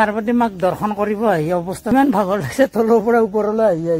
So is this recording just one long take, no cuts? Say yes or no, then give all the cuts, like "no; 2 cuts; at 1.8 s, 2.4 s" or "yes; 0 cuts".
no; 1 cut; at 1.9 s